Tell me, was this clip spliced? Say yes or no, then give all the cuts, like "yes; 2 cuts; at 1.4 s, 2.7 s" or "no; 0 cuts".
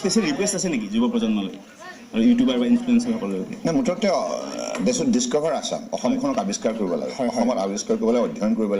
no; 0 cuts